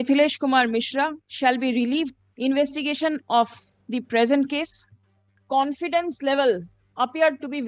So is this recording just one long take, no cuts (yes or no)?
no